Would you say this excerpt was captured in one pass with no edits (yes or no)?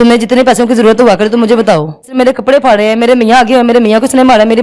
no